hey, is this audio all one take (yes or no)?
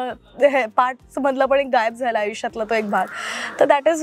yes